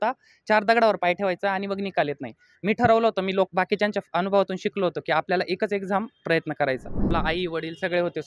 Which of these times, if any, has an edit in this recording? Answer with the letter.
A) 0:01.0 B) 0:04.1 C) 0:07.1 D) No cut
C